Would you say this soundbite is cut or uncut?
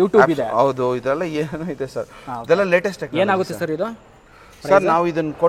uncut